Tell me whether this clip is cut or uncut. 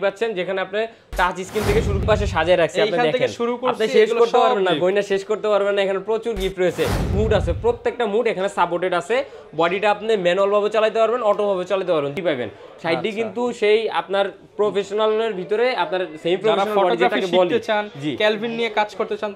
cut